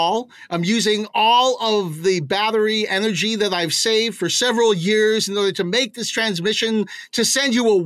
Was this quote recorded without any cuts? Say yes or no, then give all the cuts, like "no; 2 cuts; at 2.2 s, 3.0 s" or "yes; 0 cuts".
yes; 0 cuts